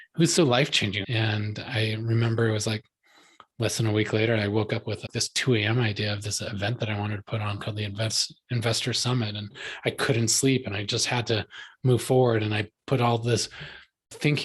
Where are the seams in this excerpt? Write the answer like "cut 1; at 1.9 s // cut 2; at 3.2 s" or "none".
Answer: cut 1; at 1.0 s